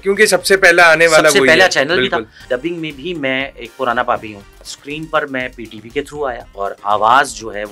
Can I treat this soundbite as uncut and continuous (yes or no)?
no